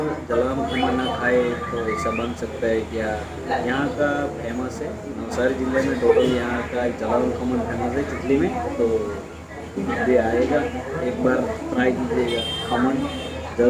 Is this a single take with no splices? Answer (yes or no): yes